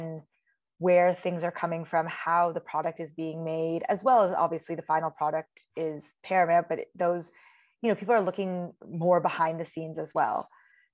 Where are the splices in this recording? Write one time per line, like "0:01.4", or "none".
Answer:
none